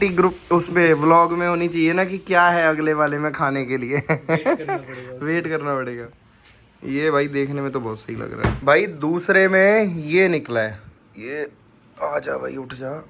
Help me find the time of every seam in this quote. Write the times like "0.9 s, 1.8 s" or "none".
none